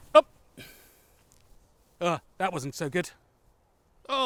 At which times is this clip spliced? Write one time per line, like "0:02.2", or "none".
none